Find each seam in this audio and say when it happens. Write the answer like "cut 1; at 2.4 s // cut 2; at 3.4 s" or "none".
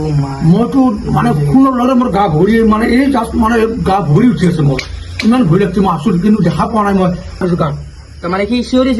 cut 1; at 7.4 s